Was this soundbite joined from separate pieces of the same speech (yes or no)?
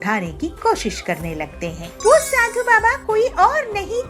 yes